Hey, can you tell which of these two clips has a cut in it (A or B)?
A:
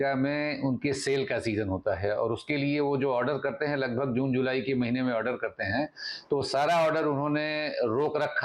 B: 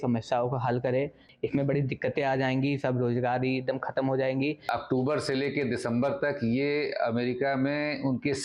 B